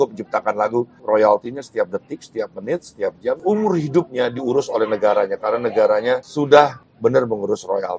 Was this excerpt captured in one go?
no; 4 cuts; at 0.9 s, 3.4 s, 6.3 s, 6.8 s

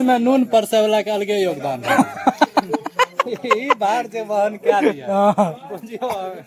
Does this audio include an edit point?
no; 0 cuts

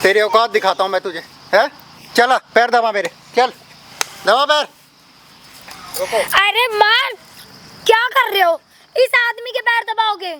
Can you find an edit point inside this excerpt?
no; 0 cuts

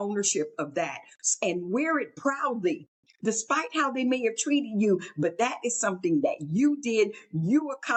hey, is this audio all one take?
yes; 0 cuts

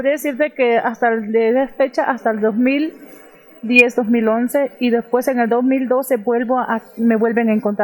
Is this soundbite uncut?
yes; 0 cuts

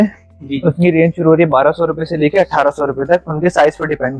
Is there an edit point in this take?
no; 0 cuts

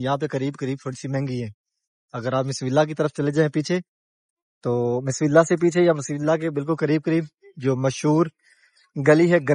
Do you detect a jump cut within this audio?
no; 0 cuts

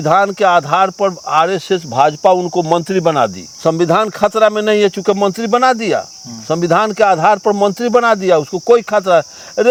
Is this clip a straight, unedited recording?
yes; 0 cuts

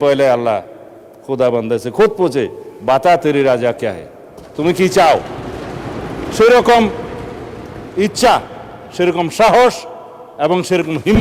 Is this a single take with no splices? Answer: yes; 0 cuts

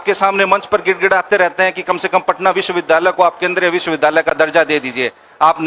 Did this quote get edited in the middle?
no; 0 cuts

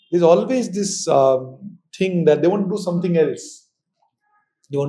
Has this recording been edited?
no; 0 cuts

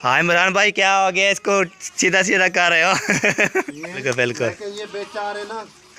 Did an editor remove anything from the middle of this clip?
yes; 1 cut; at 4.0 s

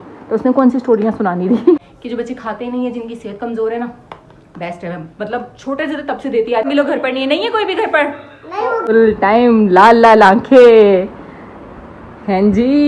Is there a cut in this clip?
yes; 3 cuts; at 1.8 s, 6.7 s, 8.8 s

